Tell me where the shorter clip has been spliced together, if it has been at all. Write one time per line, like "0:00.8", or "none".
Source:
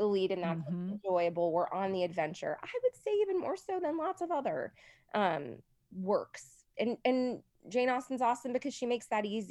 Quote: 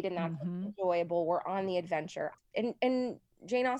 0:02.4